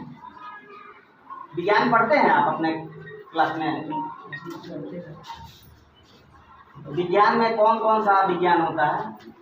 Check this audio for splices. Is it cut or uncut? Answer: uncut